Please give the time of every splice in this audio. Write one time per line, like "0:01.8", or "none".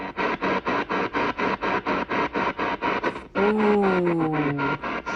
0:03.3